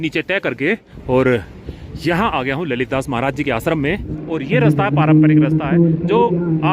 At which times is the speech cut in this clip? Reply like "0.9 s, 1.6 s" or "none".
0.9 s, 4.2 s